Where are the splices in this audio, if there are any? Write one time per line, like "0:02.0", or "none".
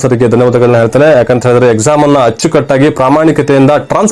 none